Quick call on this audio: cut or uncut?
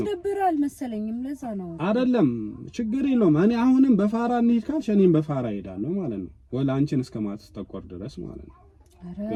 uncut